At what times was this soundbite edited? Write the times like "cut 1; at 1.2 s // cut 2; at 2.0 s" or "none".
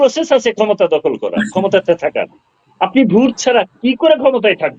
none